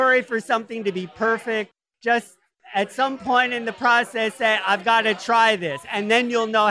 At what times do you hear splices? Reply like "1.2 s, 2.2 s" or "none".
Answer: 1.8 s